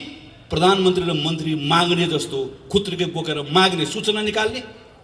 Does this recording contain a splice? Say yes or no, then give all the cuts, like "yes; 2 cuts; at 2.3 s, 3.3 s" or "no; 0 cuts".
no; 0 cuts